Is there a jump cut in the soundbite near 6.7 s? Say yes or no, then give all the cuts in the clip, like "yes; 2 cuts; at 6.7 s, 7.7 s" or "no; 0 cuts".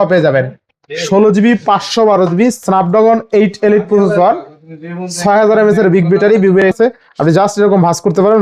yes; 1 cut; at 6.7 s